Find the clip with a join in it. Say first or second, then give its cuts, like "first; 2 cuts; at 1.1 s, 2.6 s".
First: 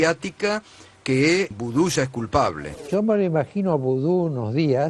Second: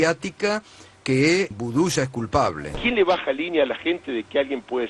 second; 1 cut; at 2.8 s